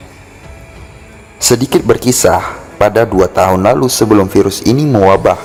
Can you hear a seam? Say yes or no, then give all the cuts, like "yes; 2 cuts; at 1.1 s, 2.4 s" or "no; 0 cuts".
no; 0 cuts